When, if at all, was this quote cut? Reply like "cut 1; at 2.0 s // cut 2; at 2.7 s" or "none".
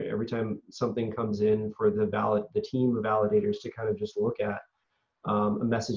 none